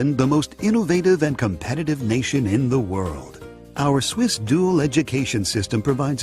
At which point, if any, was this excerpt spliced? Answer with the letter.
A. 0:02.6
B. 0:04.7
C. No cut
B